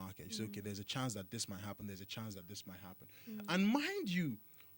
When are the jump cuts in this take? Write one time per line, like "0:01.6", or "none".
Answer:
none

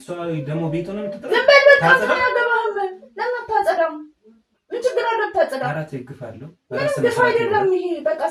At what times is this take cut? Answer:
none

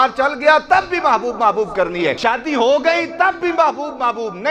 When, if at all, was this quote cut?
0:02.2

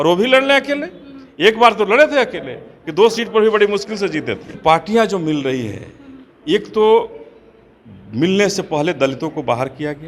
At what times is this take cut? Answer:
0:04.5

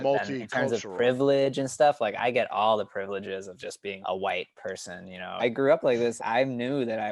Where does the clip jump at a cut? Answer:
0:04.0
0:05.4
0:06.2

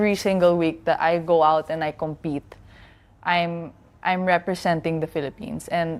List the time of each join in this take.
none

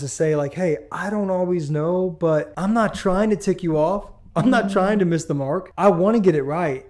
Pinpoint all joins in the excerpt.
0:02.5
0:05.6

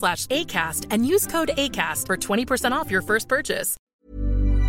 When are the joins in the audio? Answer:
0:03.7

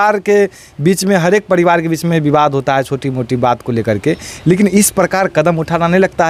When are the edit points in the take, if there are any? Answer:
none

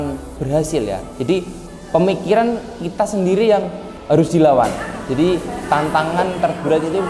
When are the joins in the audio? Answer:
0:03.9

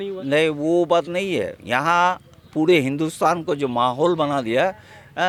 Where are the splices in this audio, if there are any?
none

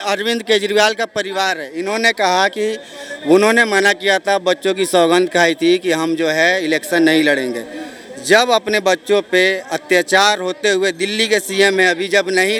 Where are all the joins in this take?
none

